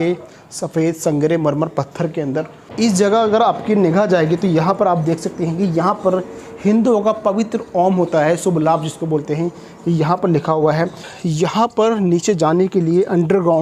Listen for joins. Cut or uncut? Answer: cut